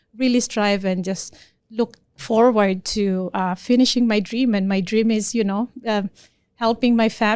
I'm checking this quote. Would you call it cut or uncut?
cut